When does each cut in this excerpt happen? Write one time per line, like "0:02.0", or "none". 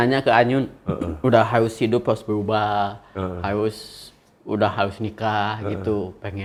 none